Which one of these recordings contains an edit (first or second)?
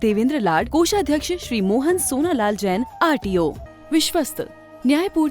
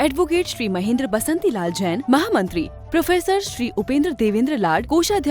first